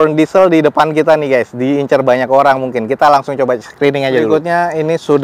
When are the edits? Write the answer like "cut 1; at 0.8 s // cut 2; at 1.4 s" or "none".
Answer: cut 1; at 4.3 s